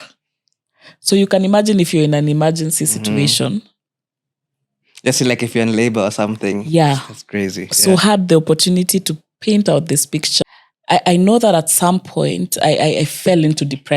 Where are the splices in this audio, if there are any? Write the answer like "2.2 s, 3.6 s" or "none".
10.3 s